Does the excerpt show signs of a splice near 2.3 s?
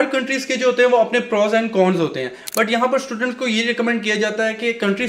no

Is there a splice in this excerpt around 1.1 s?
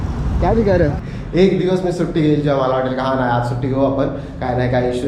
yes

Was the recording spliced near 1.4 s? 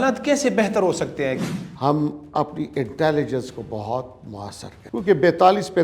yes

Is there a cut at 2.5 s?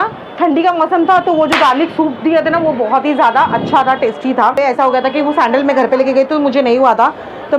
no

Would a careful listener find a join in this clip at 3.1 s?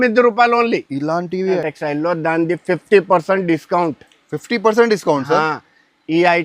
no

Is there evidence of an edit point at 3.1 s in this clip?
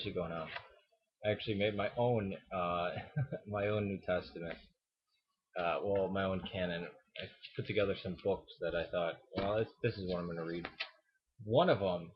no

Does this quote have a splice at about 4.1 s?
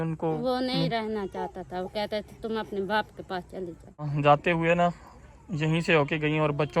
yes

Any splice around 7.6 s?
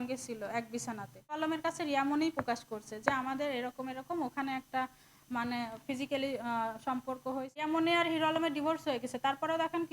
yes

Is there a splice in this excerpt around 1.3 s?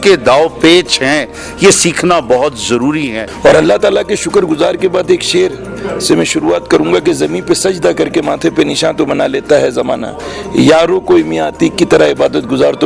no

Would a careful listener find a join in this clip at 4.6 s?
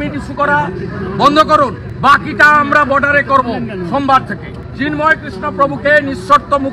yes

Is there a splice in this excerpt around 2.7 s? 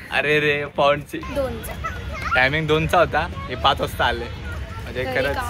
no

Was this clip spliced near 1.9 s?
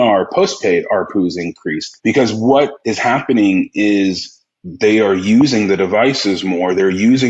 yes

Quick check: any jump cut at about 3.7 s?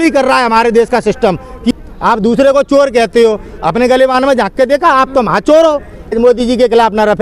no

